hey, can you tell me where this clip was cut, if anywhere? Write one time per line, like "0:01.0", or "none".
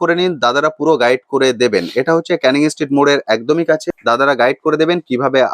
0:03.8